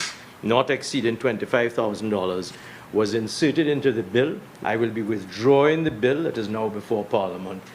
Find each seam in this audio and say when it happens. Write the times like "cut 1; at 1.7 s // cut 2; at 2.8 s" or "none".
cut 1; at 4.5 s